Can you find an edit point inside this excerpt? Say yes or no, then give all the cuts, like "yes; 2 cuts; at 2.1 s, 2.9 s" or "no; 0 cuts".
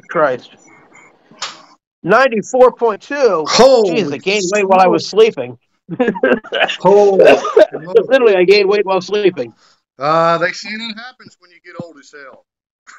no; 0 cuts